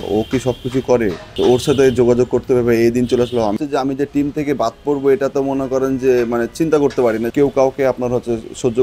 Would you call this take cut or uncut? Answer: cut